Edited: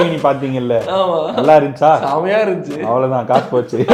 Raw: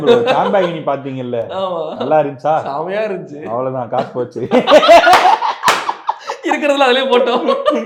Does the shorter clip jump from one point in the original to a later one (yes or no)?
no